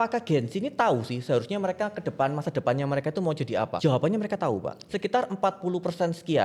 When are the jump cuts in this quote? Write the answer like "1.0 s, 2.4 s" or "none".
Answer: 3.7 s, 4.8 s